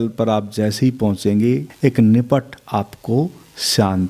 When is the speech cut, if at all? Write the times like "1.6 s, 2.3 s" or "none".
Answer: 1.7 s